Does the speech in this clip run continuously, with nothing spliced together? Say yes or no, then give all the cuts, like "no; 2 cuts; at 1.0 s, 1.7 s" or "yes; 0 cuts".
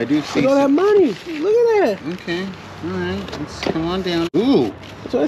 no; 1 cut; at 4.3 s